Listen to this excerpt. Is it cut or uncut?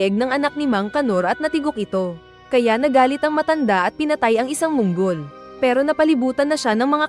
uncut